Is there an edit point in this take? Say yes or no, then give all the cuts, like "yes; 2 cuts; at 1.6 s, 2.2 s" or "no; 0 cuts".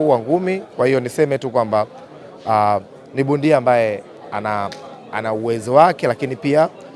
no; 0 cuts